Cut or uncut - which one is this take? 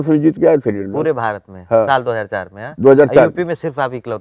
uncut